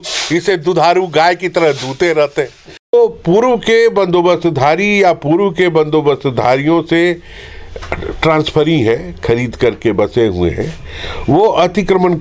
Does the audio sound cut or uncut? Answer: cut